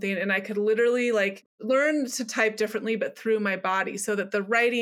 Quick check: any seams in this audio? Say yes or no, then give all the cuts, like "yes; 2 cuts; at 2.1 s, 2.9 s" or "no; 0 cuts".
yes; 1 cut; at 1.4 s